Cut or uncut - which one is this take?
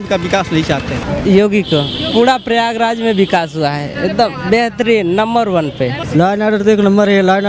cut